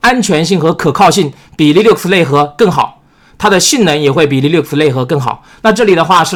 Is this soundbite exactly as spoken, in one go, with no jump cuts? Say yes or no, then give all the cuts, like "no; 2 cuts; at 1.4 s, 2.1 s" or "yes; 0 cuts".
yes; 0 cuts